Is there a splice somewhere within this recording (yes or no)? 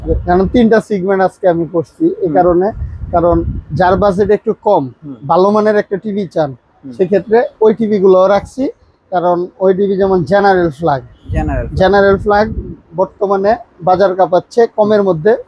no